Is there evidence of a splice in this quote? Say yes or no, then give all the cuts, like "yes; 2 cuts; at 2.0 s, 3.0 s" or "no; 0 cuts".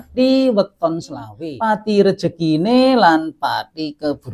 yes; 1 cut; at 1.4 s